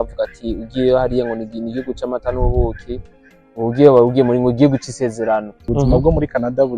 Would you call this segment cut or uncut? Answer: cut